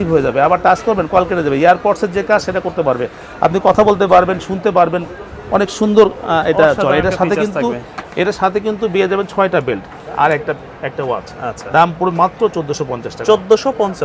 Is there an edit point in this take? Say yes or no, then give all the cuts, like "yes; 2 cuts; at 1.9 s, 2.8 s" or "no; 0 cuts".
no; 0 cuts